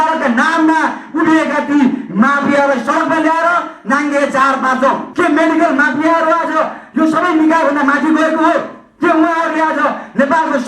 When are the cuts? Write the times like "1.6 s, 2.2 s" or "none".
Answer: 5.1 s